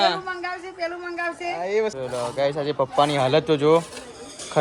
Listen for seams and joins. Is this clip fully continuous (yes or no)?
no